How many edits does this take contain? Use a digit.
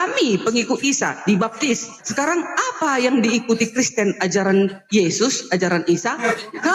1